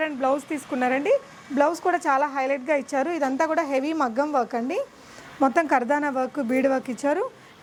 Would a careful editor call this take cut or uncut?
uncut